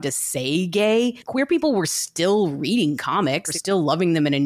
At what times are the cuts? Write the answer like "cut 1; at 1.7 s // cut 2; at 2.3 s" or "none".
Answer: cut 1; at 1.2 s // cut 2; at 3.5 s